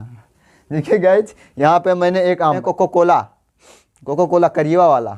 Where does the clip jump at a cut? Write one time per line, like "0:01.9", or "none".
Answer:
0:02.6